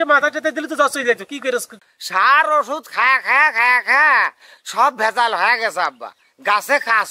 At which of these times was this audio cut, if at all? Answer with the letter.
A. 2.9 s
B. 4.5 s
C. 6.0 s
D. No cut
D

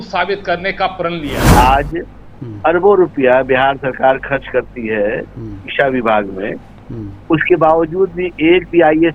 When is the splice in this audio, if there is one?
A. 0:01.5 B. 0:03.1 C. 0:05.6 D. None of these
A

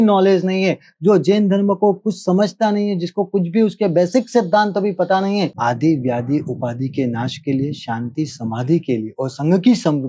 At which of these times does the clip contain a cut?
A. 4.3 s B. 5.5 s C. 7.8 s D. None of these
B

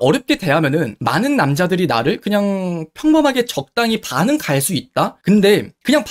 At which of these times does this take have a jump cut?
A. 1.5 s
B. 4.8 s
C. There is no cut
C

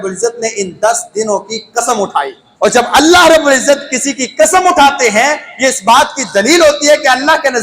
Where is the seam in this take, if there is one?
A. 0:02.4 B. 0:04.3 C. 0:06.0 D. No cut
A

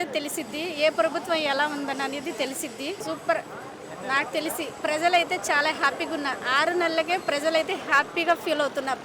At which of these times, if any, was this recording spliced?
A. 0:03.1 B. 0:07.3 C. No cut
A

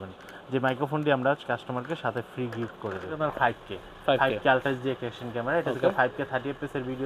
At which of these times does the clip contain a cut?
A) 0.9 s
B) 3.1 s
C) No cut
B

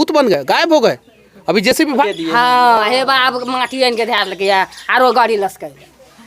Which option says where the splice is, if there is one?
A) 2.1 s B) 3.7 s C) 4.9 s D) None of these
A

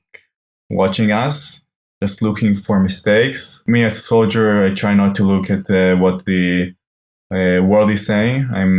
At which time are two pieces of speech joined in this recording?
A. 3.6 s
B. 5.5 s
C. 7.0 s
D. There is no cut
A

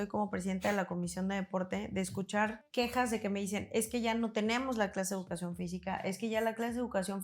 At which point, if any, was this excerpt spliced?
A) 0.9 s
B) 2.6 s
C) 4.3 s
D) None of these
B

